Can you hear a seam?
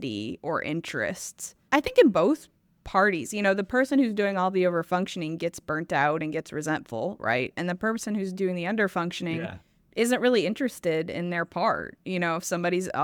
no; 0 cuts

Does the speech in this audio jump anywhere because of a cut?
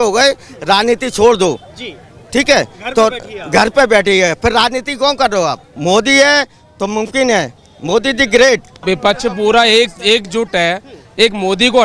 yes; 2 cuts; at 5.7 s, 8.7 s

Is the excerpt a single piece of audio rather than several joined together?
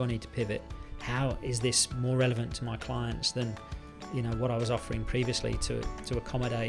yes; 0 cuts

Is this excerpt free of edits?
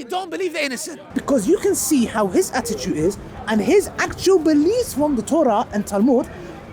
no; 1 cut; at 1.1 s

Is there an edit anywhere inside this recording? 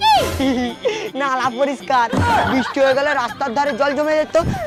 no; 0 cuts

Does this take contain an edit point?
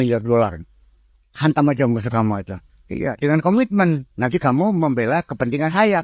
no; 0 cuts

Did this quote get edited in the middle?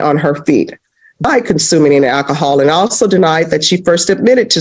yes; 1 cut; at 1.2 s

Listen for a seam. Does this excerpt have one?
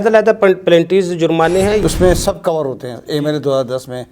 yes; 1 cut; at 1.8 s

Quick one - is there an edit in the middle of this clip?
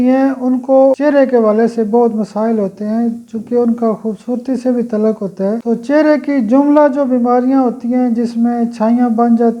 yes; 2 cuts; at 1.0 s, 5.6 s

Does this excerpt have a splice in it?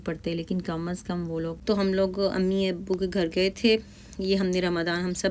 yes; 1 cut; at 1.5 s

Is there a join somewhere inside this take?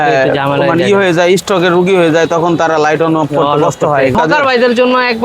yes; 1 cut; at 4.1 s

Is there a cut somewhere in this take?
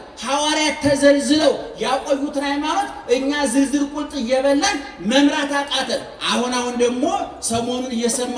no; 0 cuts

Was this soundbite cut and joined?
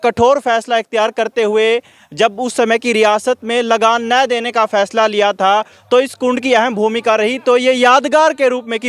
no; 0 cuts

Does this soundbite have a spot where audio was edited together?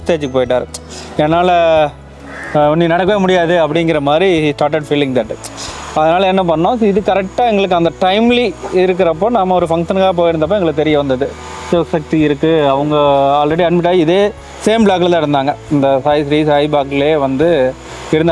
no; 0 cuts

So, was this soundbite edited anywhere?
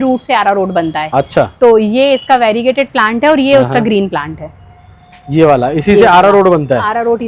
no; 0 cuts

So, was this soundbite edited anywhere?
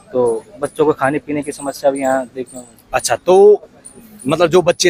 no; 0 cuts

